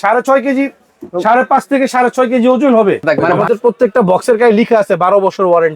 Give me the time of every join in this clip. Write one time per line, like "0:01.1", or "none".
0:03.4